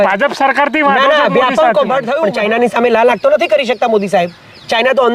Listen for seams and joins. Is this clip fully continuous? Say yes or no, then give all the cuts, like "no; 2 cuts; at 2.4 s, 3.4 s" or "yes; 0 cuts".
no; 1 cut; at 2.2 s